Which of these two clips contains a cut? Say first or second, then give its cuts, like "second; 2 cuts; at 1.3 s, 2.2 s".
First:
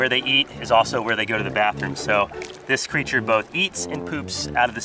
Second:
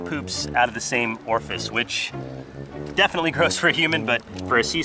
second; 1 cut; at 2.7 s